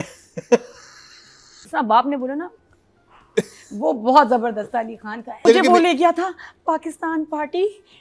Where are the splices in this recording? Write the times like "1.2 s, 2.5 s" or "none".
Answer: 1.6 s, 5.4 s